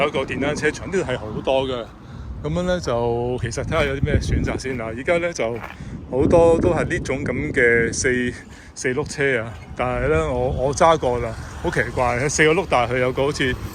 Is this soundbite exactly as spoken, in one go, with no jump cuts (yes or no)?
yes